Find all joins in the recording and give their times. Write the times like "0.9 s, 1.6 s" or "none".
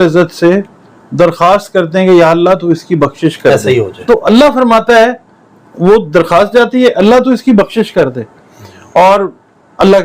3.6 s